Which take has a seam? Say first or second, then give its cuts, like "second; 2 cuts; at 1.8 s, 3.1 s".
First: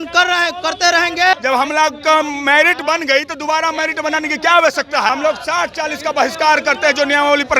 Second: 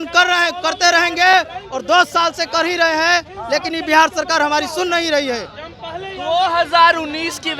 first; 2 cuts; at 1.3 s, 5.1 s